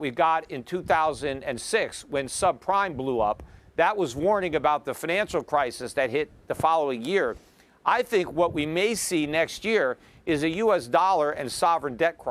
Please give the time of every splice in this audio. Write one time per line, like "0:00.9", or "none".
none